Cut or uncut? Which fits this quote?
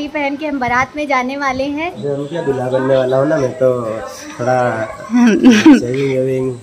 cut